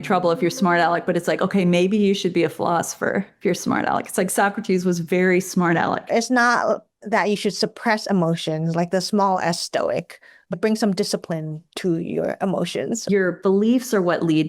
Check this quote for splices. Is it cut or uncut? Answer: cut